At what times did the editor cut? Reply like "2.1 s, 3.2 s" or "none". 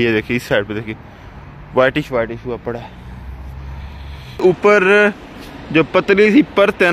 4.4 s